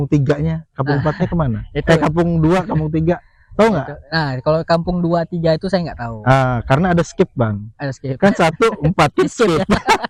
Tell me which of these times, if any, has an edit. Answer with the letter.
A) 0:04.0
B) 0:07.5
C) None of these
C